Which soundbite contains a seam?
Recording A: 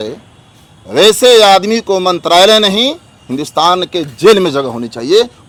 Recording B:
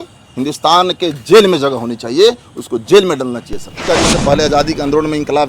B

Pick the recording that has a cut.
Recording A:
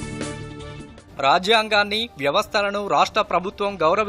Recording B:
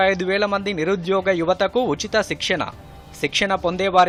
A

